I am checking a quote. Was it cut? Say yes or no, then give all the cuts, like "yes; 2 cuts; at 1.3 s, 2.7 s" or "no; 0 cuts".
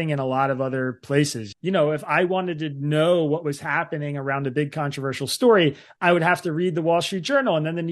yes; 1 cut; at 1.5 s